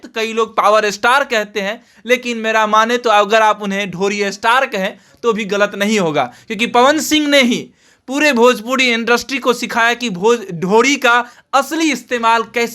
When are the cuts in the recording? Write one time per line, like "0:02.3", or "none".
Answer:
none